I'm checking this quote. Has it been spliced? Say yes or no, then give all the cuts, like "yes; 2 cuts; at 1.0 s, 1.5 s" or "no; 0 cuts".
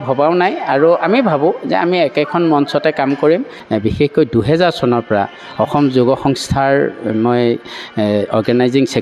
yes; 1 cut; at 3.5 s